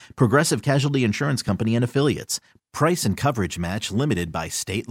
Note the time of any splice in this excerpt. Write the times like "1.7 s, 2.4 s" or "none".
none